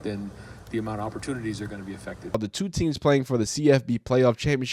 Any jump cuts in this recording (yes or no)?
yes